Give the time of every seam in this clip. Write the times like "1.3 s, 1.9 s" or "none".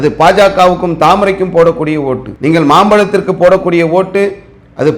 2.3 s